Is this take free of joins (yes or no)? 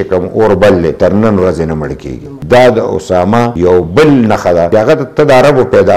yes